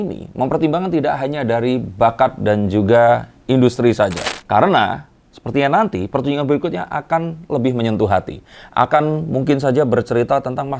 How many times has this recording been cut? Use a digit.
1